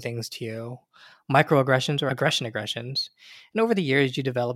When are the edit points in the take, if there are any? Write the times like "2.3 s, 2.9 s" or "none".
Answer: 2.1 s